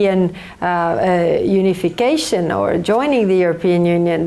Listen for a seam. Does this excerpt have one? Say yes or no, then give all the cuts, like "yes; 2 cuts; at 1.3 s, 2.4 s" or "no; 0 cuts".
no; 0 cuts